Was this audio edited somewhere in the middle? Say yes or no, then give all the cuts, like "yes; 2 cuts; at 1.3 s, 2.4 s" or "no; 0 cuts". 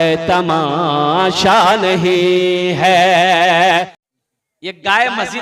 yes; 1 cut; at 4.0 s